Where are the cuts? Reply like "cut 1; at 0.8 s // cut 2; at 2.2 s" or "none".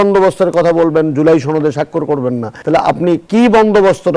none